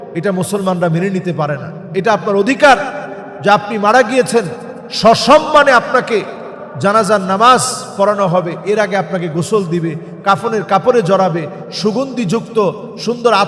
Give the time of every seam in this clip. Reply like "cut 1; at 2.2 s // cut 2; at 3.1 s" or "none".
none